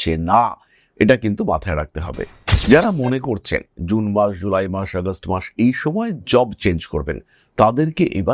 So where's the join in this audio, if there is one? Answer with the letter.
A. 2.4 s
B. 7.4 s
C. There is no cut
A